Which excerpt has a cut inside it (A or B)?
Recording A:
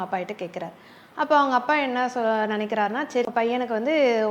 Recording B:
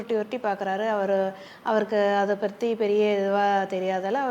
A